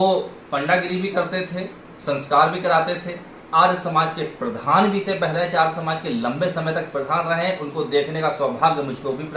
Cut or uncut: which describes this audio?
uncut